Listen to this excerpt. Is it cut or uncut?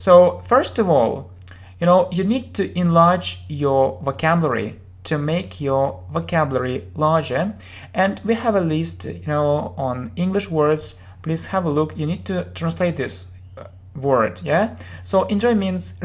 uncut